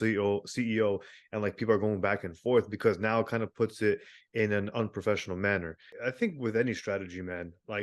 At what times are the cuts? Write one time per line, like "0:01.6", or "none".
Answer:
0:06.0